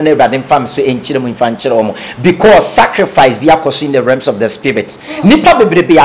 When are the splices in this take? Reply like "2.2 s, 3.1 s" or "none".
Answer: none